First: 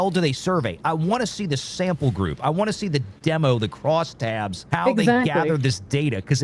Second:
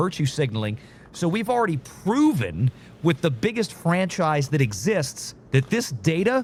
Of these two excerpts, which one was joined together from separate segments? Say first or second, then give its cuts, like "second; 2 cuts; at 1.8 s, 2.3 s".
first; 1 cut; at 4.6 s